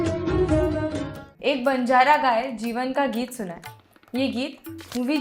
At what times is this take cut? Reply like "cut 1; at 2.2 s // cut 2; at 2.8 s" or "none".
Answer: cut 1; at 1.0 s